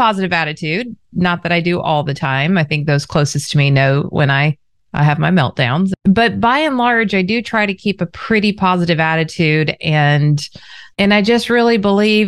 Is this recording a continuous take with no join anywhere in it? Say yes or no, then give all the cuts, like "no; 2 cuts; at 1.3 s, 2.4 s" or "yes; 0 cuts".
no; 1 cut; at 5.9 s